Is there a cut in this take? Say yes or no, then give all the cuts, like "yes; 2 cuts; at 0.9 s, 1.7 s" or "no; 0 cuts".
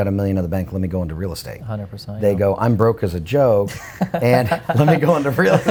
no; 0 cuts